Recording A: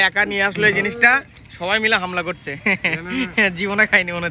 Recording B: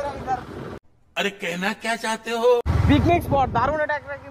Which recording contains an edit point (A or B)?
B